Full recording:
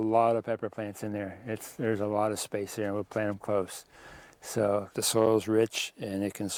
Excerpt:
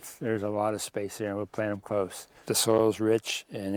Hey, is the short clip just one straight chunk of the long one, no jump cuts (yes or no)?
no